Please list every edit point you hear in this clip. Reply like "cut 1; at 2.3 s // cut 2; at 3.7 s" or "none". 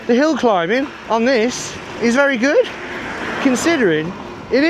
cut 1; at 1.0 s